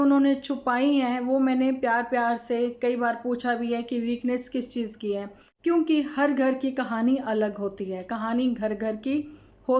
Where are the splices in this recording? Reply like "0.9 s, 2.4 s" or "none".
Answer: 5.4 s

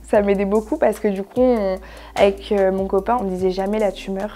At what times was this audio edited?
3.2 s

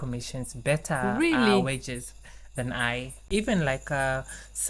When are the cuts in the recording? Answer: 3.3 s

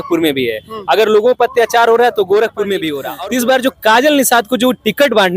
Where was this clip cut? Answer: 3.0 s

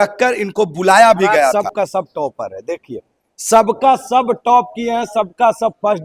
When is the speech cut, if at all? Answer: 1.5 s

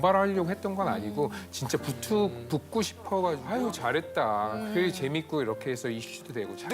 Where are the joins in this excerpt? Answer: 3.4 s

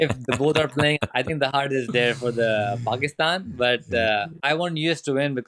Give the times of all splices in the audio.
1.0 s, 4.3 s

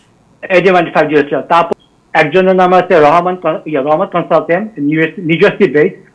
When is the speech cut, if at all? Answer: 1.7 s

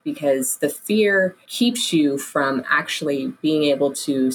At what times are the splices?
1.4 s

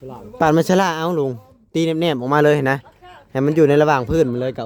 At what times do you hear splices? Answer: none

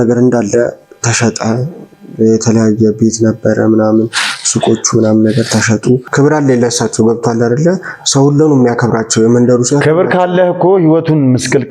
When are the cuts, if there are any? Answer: 6.1 s

